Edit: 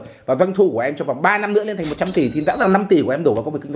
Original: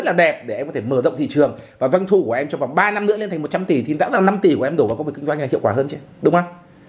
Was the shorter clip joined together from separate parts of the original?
no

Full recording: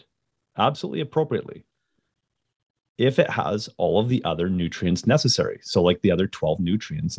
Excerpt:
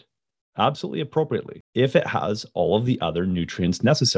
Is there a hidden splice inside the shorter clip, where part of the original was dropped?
yes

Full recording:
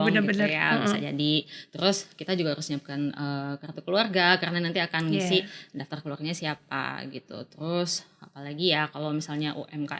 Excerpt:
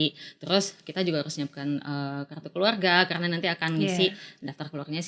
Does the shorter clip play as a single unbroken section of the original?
yes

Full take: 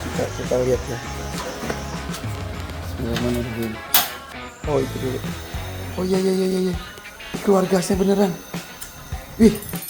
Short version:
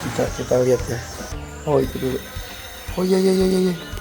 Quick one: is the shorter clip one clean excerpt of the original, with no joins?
no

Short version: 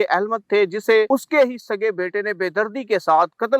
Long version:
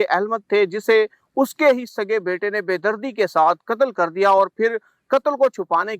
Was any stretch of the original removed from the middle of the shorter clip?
yes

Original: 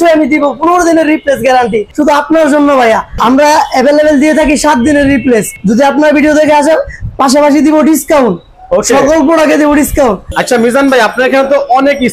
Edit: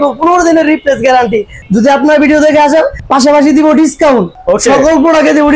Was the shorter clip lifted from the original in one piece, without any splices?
no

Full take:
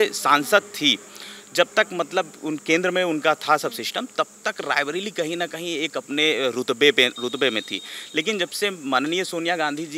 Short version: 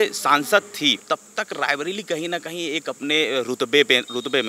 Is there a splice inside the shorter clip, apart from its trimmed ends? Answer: yes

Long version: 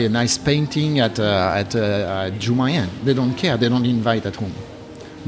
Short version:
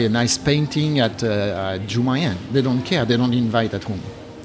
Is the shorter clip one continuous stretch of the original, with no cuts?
no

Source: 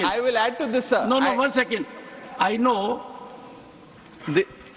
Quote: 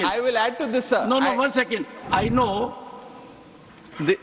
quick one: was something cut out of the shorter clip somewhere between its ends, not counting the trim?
yes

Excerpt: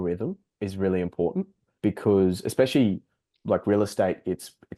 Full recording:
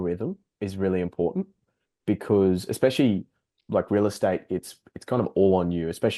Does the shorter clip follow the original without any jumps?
no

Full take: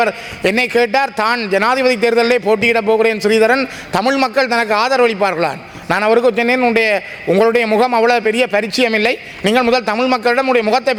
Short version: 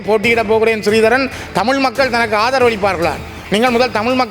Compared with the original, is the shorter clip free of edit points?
no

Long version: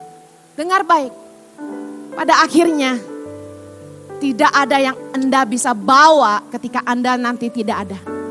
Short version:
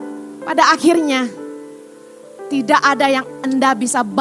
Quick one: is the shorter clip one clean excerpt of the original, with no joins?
yes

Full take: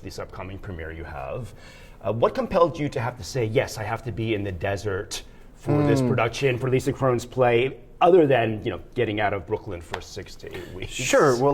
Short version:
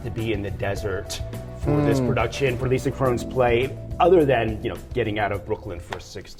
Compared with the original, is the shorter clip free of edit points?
yes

